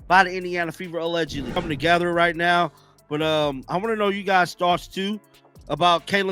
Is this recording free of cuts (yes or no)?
no